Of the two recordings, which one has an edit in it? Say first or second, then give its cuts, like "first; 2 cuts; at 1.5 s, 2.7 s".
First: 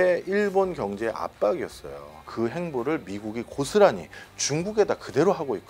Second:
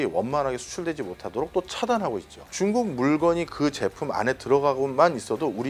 first; 1 cut; at 2.2 s